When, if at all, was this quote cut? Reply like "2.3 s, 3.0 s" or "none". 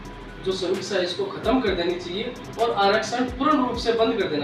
none